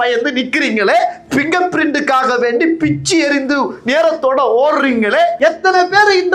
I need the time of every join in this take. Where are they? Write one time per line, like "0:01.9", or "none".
0:05.4